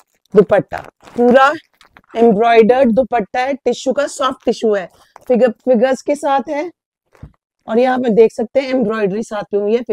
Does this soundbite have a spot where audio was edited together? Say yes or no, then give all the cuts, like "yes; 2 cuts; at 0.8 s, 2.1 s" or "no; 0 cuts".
no; 0 cuts